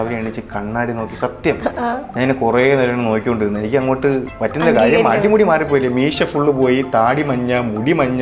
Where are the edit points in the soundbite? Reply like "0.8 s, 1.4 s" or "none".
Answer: 4.3 s